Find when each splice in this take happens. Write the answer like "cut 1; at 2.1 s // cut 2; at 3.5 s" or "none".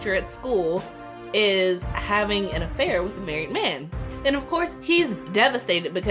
cut 1; at 4.1 s